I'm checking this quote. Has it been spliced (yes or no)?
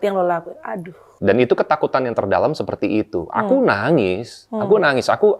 yes